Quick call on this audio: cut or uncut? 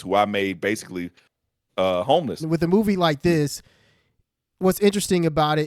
cut